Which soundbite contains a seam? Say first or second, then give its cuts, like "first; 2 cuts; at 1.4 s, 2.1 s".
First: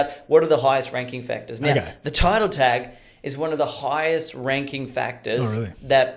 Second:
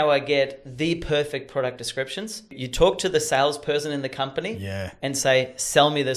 second; 1 cut; at 2.6 s